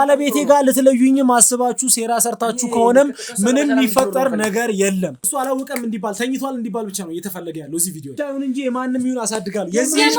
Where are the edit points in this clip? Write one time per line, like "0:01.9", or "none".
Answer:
0:05.2
0:08.2